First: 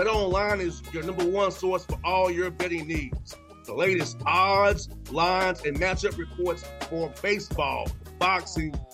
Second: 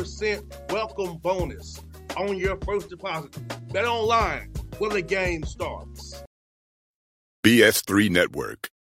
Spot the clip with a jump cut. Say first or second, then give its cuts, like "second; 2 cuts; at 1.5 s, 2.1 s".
second; 1 cut; at 6.2 s